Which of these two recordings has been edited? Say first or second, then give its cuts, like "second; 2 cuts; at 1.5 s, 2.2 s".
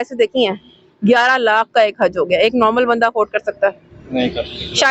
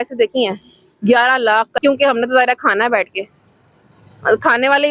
second; 1 cut; at 1.7 s